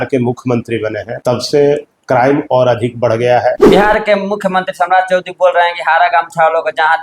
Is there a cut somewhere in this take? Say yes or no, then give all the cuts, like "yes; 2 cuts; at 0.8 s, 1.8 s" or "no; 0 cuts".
yes; 2 cuts; at 1.1 s, 3.6 s